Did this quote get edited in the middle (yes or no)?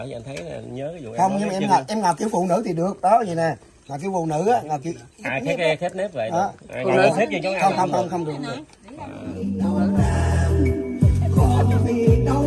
yes